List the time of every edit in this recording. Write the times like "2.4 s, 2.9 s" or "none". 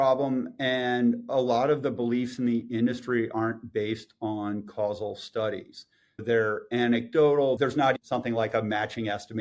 6.2 s, 7.8 s